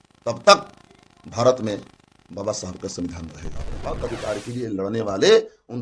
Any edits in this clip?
yes; 1 cut; at 3.8 s

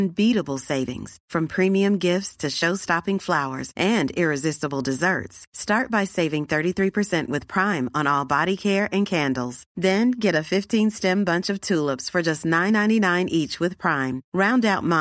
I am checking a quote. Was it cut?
no; 0 cuts

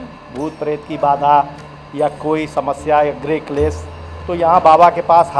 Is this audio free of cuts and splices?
yes; 0 cuts

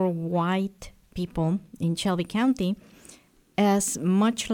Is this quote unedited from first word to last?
yes; 0 cuts

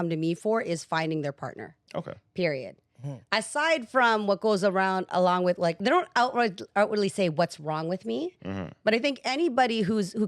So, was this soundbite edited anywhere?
yes; 1 cut; at 5.8 s

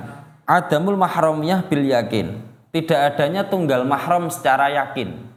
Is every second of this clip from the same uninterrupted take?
yes; 0 cuts

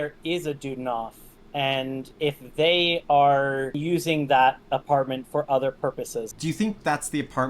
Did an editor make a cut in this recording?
yes; 3 cuts; at 2.1 s, 3.8 s, 6.3 s

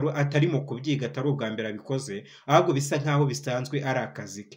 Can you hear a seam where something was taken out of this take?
no; 0 cuts

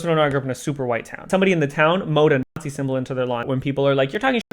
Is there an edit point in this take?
yes; 2 cuts; at 1.3 s, 3.4 s

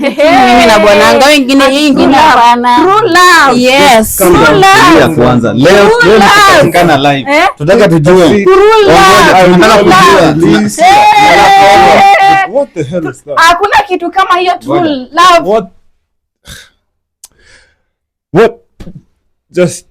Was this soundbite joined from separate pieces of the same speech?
no; 0 cuts

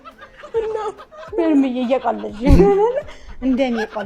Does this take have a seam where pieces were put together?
no; 0 cuts

